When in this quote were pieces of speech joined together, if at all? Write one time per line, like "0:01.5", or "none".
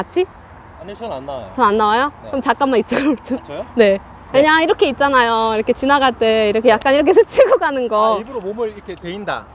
0:04.1

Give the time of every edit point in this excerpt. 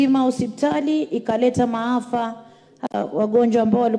0:02.9

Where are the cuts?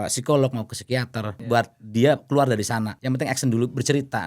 0:01.4
0:02.9

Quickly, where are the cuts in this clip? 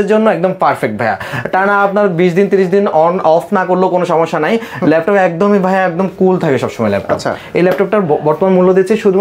none

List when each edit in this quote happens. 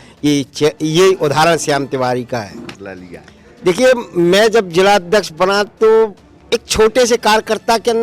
0:02.7

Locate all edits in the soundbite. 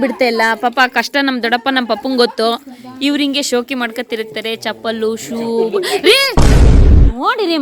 none

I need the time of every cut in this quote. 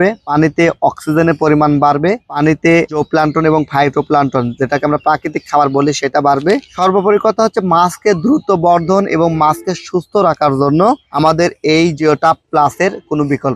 none

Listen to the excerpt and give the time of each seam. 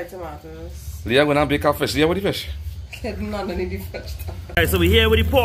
0:04.5

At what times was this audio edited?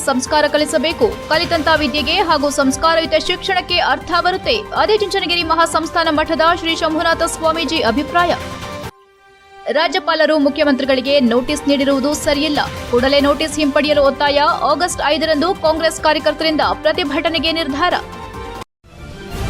0:18.5

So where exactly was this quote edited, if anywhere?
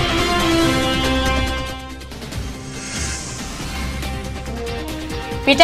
none

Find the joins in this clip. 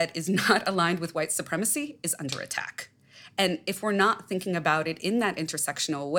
none

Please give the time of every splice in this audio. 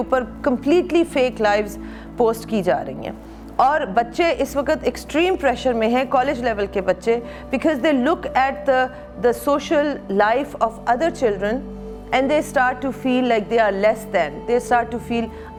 none

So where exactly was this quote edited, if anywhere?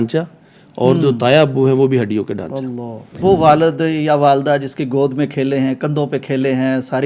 0:03.1

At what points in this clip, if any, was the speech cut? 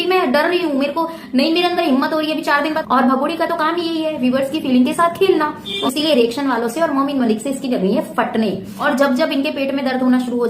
0:02.8
0:05.7
0:08.7

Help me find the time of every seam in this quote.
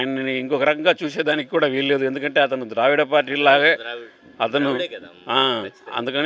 none

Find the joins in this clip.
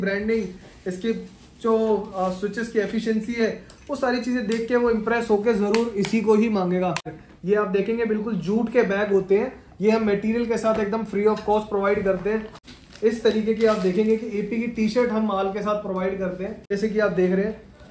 0:07.1
0:12.6
0:16.6

